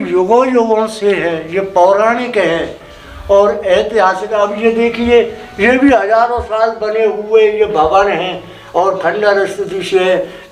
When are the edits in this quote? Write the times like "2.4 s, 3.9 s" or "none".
none